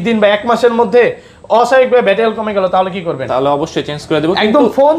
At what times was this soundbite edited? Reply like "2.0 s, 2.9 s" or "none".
none